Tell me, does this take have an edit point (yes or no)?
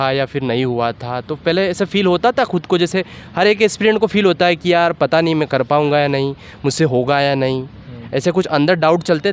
no